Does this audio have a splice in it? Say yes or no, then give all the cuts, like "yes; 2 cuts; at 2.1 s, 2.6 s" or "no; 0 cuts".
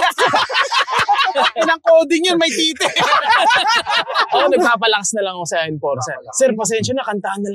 yes; 2 cuts; at 1.3 s, 4.3 s